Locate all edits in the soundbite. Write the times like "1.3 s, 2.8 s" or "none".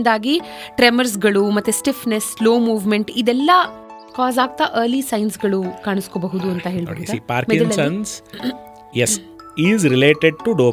none